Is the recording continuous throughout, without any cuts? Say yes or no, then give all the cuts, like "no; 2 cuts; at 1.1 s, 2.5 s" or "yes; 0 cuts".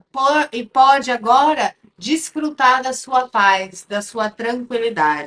yes; 0 cuts